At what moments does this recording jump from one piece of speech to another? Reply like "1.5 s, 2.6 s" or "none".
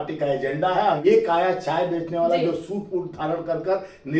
1.0 s